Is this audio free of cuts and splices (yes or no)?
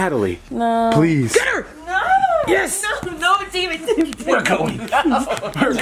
yes